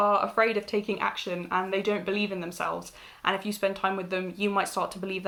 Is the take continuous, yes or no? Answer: yes